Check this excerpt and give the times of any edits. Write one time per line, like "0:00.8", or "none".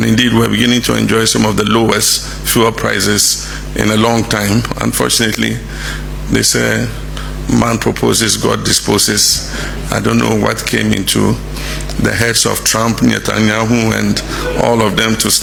none